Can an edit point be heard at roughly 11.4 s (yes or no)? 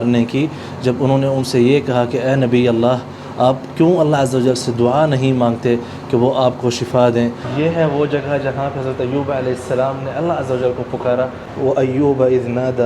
yes